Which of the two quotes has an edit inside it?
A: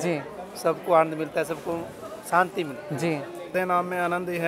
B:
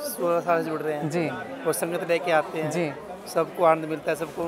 A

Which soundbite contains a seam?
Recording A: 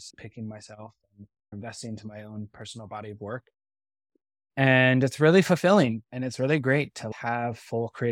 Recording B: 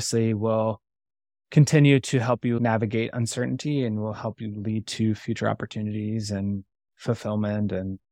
A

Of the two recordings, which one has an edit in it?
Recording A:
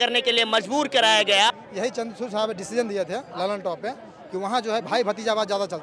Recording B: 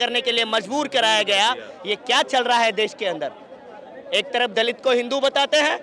A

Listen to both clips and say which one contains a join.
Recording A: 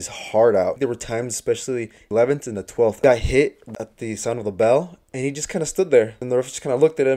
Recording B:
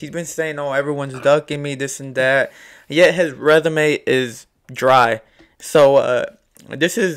A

